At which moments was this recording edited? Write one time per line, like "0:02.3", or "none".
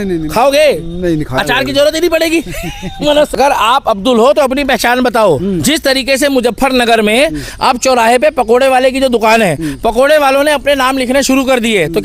0:03.3